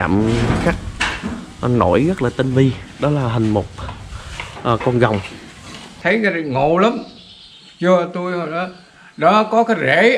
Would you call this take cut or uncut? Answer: cut